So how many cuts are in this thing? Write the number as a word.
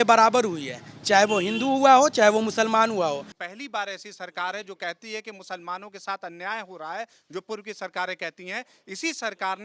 one